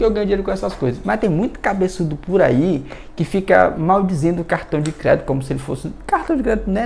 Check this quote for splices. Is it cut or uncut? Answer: uncut